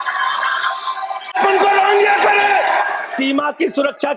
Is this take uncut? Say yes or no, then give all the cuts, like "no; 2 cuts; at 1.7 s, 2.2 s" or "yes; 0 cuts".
no; 2 cuts; at 1.3 s, 3.0 s